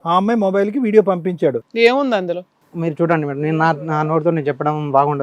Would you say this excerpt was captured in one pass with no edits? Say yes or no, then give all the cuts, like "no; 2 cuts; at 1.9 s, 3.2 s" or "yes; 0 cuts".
no; 1 cut; at 1.6 s